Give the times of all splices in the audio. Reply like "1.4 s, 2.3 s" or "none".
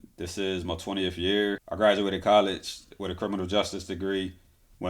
1.7 s